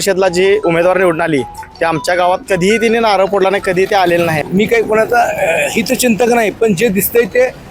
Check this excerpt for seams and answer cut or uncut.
cut